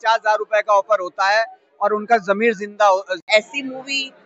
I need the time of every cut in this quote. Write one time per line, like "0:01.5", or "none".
0:03.2